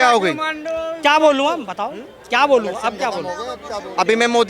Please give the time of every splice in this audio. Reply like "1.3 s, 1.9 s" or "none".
none